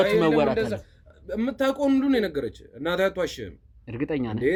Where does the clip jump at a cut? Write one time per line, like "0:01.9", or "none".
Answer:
none